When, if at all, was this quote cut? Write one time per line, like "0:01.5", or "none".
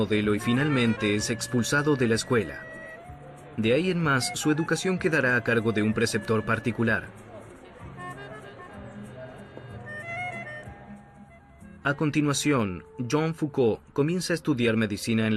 none